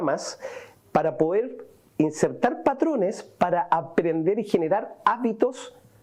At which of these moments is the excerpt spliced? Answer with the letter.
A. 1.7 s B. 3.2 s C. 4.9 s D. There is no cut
D